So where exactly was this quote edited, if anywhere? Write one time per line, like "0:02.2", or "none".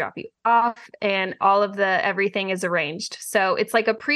none